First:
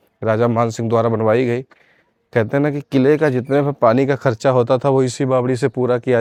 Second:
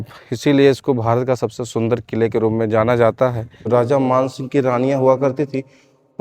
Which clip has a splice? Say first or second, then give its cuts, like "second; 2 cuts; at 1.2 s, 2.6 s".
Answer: second; 1 cut; at 3.7 s